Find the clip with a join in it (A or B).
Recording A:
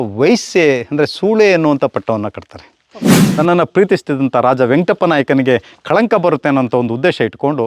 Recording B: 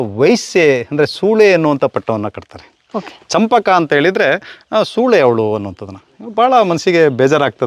A